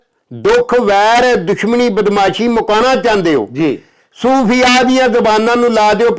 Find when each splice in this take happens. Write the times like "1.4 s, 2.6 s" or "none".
none